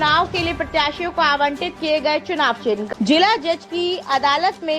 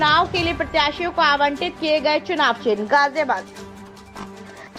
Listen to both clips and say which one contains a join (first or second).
first